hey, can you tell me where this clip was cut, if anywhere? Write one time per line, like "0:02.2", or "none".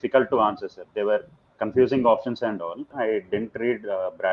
0:02.9